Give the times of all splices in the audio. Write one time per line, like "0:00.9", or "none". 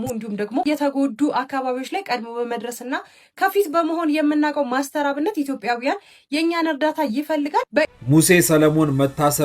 0:07.9